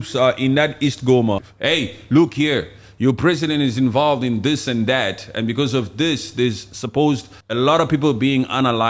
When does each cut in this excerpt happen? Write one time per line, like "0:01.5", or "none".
0:01.5
0:07.4